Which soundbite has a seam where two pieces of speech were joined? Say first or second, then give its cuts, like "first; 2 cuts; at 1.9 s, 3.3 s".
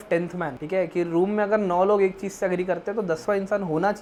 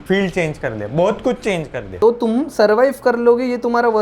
second; 1 cut; at 1.8 s